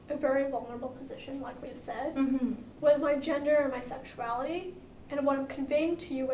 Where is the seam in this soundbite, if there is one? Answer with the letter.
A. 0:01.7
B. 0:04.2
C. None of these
C